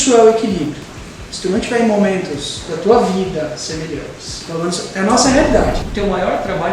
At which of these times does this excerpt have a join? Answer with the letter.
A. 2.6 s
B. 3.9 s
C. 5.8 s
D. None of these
C